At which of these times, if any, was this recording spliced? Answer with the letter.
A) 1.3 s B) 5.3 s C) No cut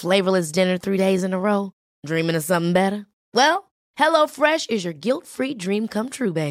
C